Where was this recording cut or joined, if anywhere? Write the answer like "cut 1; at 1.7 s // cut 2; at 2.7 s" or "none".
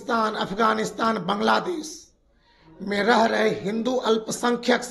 none